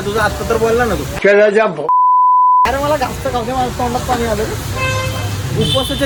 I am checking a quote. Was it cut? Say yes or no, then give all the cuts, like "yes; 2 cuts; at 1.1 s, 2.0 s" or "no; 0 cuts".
no; 0 cuts